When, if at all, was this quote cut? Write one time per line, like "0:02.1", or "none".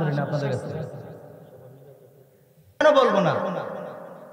0:02.8